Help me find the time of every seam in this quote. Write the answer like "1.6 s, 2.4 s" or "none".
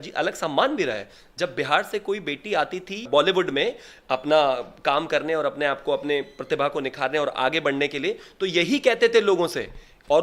none